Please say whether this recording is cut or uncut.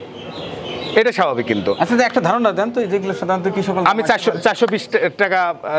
uncut